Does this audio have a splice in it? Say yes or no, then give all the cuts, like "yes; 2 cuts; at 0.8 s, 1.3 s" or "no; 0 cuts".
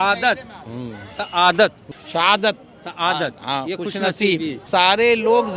yes; 2 cuts; at 1.9 s, 4.6 s